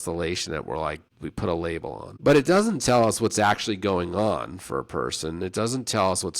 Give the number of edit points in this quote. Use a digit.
2